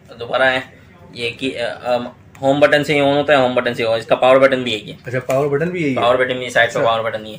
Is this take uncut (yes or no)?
yes